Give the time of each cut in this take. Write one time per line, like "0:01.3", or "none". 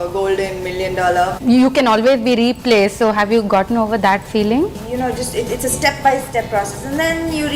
0:01.3
0:04.8